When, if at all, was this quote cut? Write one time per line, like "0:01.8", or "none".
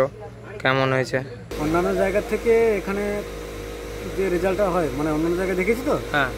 0:01.5